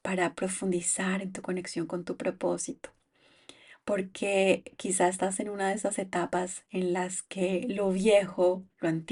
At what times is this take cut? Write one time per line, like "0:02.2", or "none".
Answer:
none